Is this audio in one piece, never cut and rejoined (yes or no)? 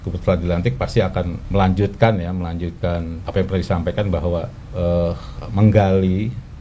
no